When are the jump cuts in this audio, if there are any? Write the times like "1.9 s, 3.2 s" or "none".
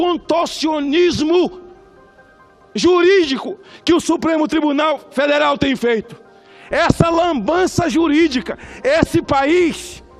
none